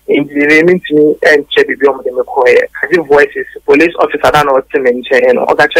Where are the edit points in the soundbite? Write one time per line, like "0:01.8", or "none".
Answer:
0:03.5